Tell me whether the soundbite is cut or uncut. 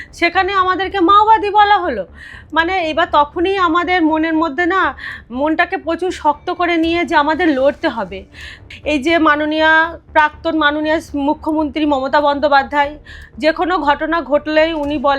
cut